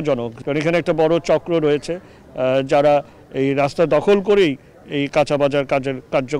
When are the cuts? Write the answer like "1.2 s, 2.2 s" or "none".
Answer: none

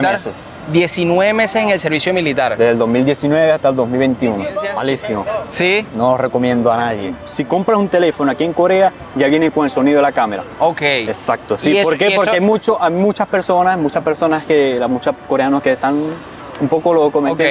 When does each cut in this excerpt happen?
4.7 s, 7.3 s

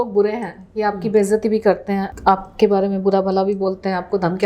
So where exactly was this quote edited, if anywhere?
2.1 s

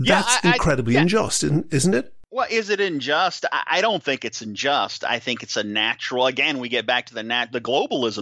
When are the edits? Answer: 2.2 s

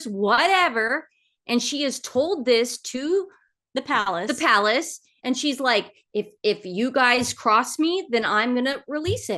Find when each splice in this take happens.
none

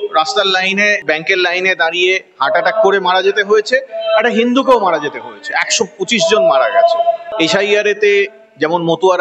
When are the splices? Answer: 1.0 s, 7.3 s

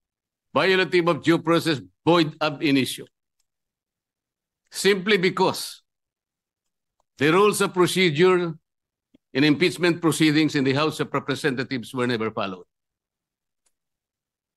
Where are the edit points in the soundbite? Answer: none

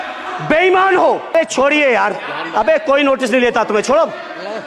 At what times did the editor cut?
1.3 s

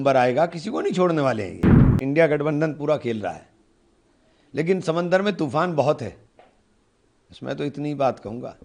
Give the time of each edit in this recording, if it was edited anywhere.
2.0 s

